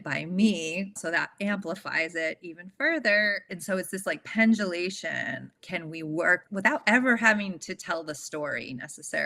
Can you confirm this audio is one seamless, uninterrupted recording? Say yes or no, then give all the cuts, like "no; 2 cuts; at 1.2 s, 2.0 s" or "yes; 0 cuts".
no; 4 cuts; at 1.0 s, 3.5 s, 5.4 s, 6.4 s